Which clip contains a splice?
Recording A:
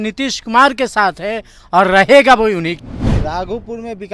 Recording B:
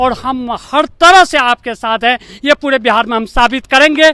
A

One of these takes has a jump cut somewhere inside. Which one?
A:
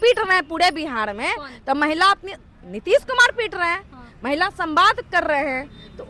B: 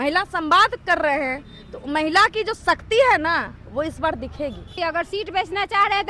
B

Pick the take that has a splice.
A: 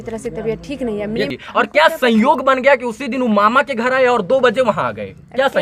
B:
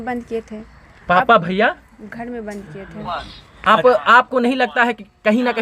A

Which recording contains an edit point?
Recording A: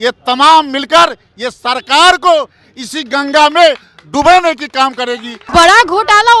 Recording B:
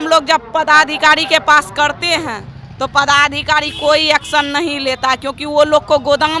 A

